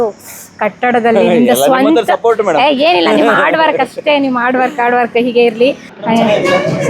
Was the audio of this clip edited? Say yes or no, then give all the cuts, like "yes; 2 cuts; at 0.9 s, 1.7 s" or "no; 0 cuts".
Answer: yes; 1 cut; at 5.9 s